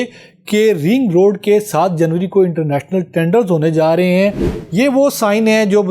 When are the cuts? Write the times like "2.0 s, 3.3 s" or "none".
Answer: 4.5 s